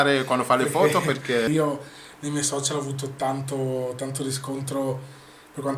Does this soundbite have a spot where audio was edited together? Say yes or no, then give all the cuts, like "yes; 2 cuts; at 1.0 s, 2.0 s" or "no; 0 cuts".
yes; 1 cut; at 1.5 s